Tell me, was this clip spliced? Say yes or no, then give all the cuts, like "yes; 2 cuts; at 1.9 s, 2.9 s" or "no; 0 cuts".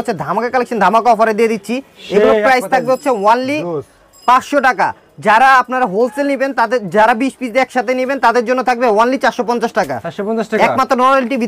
no; 0 cuts